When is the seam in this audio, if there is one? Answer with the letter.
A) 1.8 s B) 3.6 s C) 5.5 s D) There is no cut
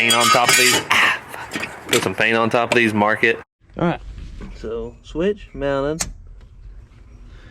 B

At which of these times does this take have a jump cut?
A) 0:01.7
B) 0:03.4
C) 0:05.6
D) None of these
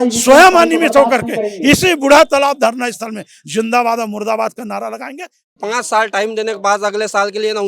C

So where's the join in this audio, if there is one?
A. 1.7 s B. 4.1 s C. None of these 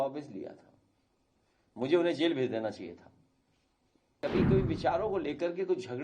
B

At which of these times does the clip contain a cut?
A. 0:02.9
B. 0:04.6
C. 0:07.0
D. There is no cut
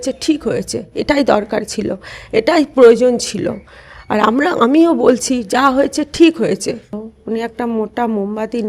C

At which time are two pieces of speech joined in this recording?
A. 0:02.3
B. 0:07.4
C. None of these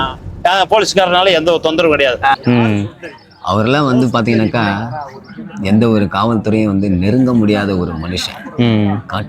A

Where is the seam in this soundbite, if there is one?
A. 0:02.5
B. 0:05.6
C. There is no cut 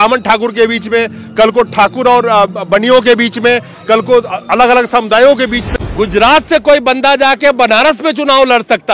B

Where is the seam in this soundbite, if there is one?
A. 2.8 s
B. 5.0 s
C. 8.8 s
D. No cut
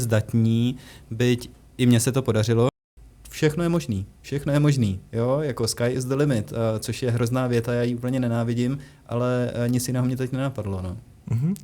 A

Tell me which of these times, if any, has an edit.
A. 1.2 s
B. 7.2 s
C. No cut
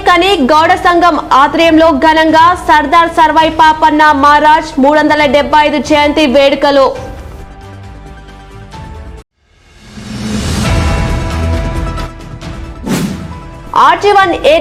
C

